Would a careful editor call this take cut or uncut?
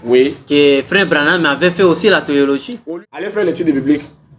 cut